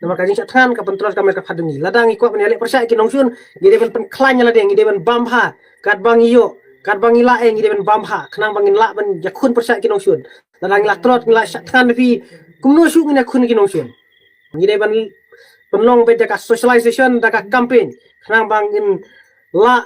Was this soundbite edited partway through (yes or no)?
yes